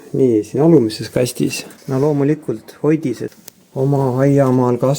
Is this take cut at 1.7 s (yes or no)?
yes